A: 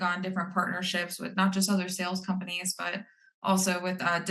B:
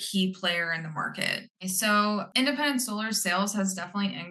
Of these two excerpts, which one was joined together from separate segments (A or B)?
B